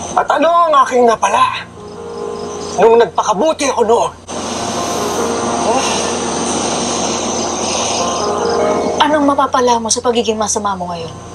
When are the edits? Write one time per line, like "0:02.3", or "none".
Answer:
none